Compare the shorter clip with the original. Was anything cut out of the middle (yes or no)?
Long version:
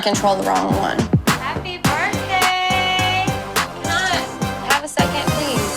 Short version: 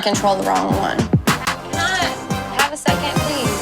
yes